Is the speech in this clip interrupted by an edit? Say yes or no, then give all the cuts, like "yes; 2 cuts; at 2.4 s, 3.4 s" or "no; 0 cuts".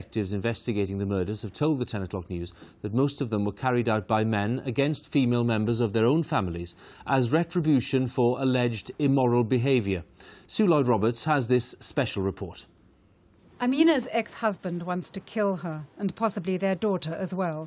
no; 0 cuts